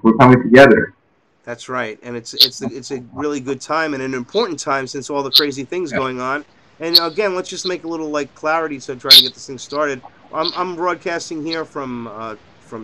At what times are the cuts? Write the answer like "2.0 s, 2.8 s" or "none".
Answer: 1.7 s